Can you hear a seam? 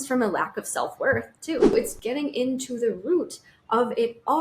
yes; 1 cut; at 1.7 s

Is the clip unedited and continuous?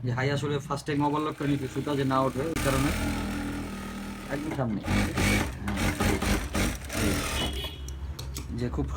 yes; 0 cuts

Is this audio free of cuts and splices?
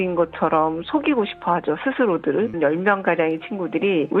no; 1 cut; at 2.6 s

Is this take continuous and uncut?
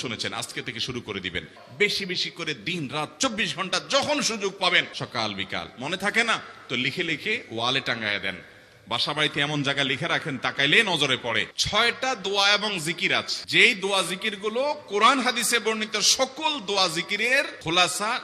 no; 3 cuts; at 1.6 s, 4.9 s, 11.5 s

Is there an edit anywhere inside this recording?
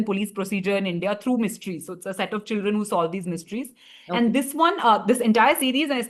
no; 0 cuts

